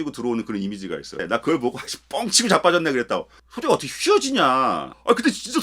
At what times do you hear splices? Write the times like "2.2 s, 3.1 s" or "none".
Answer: 1.2 s